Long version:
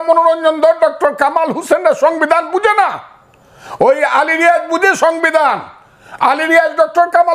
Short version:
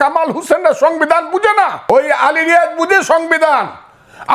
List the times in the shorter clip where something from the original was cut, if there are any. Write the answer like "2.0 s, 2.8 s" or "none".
1.8 s